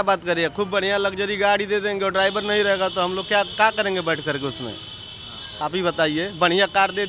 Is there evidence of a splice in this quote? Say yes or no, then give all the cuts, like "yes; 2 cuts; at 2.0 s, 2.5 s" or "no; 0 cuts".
no; 0 cuts